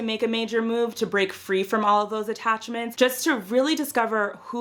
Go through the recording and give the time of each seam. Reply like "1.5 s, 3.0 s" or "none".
none

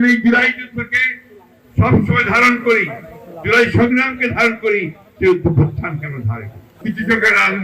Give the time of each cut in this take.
6.7 s

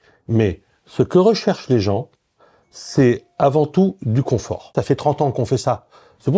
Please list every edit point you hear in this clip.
4.8 s

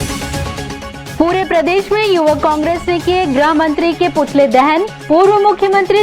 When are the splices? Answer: none

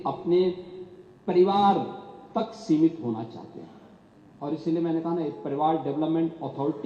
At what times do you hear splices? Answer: none

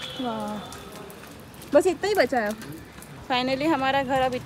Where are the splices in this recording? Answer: 3.1 s

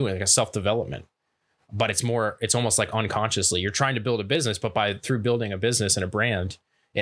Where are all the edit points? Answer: none

